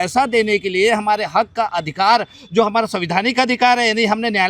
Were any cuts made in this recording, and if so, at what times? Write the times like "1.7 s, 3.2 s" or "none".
none